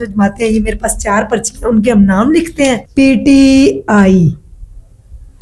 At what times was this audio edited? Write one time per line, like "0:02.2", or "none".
0:02.8